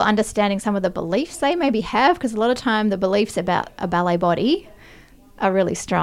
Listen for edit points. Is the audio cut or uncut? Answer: uncut